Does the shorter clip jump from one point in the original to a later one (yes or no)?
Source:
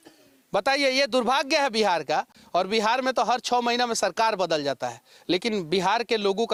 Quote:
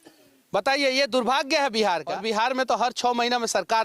yes